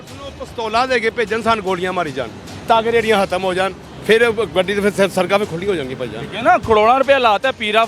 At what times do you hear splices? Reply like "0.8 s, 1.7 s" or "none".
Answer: 3.9 s